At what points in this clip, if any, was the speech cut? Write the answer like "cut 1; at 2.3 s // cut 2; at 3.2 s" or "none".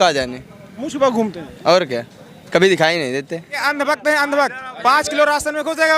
cut 1; at 3.6 s

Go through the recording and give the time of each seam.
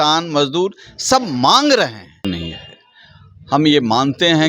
cut 1; at 2.2 s

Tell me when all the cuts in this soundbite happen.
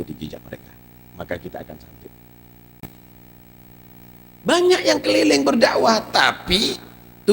cut 1; at 2.8 s

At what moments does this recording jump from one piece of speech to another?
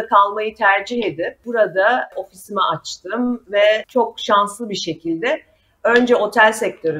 cut 1; at 1.3 s

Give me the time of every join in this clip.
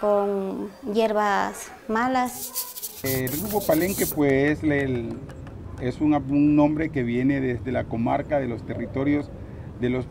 cut 1; at 3.0 s

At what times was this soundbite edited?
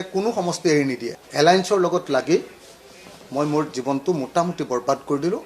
cut 1; at 1.2 s

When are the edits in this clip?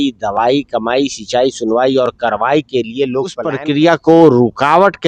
cut 1; at 3.6 s

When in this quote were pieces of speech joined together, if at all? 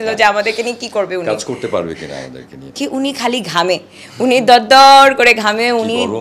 cut 1; at 2.8 s

